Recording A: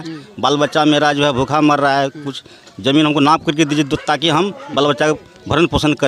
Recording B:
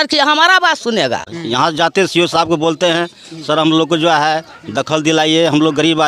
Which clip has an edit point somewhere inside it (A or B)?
B